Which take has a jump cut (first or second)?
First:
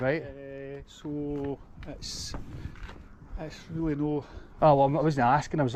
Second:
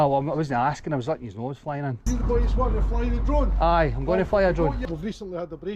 second